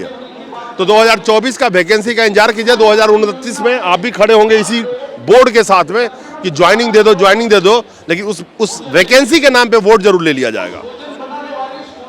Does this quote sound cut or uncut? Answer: uncut